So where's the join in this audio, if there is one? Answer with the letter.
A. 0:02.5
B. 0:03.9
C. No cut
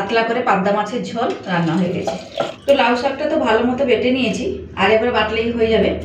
A